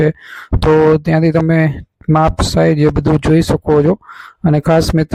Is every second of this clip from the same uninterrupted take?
yes; 0 cuts

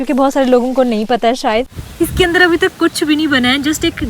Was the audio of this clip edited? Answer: yes; 1 cut; at 1.8 s

